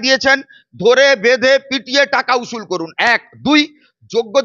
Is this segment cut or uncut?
uncut